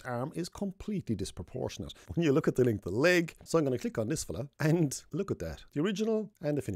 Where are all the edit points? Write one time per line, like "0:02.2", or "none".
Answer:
0:02.0
0:03.4
0:05.6